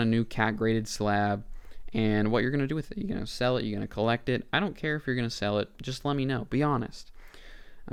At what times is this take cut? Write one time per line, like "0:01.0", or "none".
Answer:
none